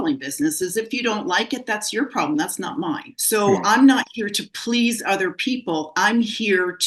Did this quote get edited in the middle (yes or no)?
yes